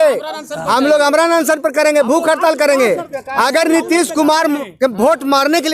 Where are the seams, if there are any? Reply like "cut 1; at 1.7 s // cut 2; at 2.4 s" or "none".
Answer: cut 1; at 3.2 s